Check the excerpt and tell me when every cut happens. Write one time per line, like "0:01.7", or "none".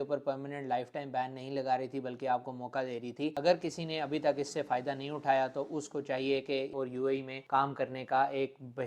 0:03.4
0:06.7